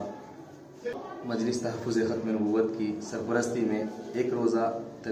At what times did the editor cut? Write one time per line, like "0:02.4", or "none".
none